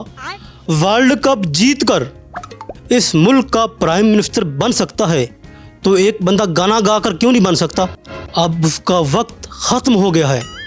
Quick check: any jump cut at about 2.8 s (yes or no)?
no